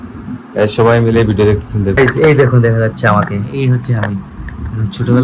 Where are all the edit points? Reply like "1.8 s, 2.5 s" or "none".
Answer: 1.9 s